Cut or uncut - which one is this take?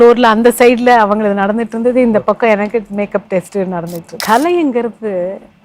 cut